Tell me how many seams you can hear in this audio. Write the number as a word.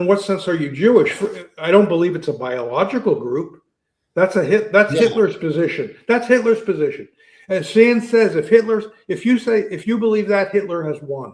zero